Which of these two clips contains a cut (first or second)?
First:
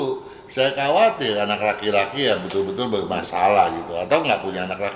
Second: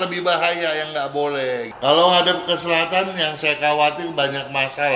second